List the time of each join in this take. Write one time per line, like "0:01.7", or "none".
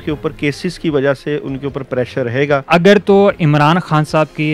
0:02.6